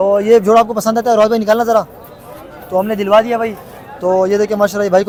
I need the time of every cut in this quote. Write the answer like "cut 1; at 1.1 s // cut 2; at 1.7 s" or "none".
none